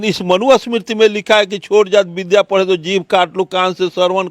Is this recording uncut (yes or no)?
yes